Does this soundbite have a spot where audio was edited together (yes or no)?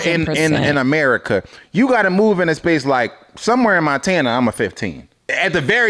no